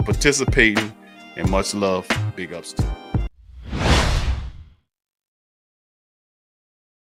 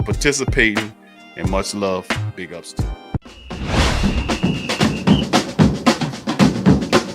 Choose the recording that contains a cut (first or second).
second